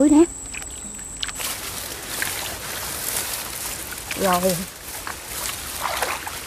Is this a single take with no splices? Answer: no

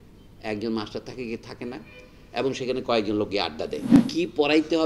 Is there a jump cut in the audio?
yes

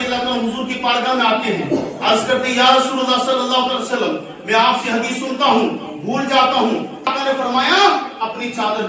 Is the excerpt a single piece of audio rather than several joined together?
no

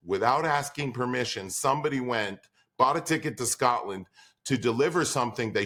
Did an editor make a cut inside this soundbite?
no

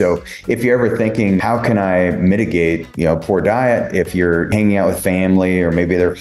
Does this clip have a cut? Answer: yes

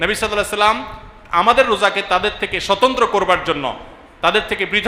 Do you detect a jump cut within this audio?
no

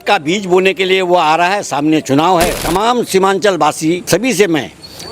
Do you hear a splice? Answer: yes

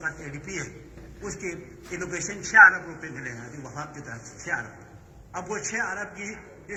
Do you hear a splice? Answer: no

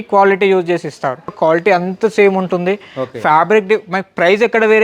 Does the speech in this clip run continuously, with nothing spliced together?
no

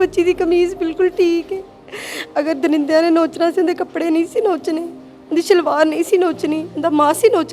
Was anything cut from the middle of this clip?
no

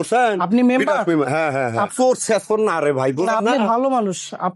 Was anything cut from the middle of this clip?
yes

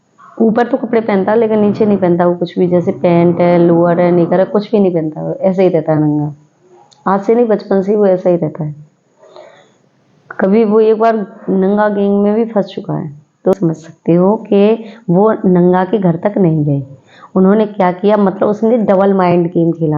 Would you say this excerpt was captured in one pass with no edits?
no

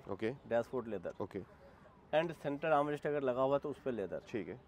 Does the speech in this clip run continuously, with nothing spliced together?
yes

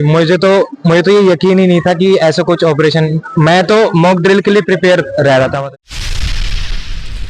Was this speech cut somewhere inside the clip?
yes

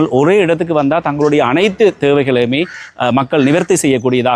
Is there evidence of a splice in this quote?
no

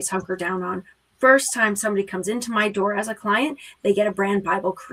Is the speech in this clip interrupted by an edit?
no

